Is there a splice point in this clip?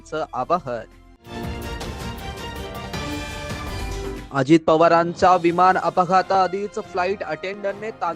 yes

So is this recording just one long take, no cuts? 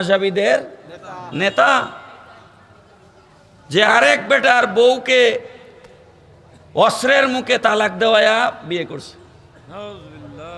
yes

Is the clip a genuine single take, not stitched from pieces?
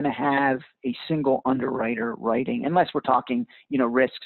yes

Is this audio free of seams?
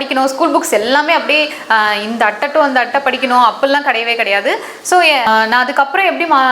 no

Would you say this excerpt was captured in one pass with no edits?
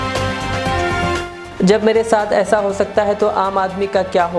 no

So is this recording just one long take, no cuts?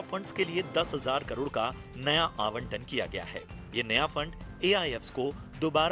no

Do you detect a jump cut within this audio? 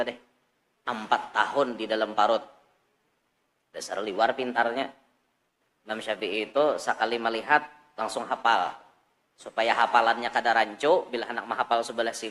no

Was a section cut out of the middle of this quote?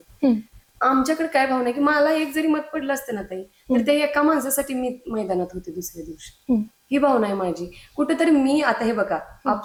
no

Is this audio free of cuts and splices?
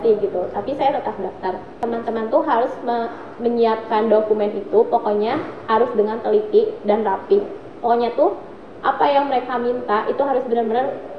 no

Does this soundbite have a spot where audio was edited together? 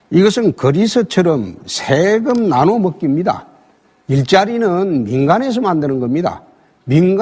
yes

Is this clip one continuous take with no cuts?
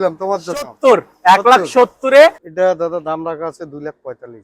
no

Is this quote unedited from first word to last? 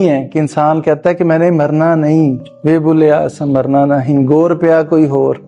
no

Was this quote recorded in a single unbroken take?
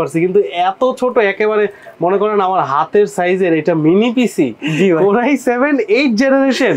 no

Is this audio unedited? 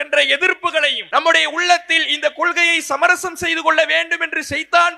no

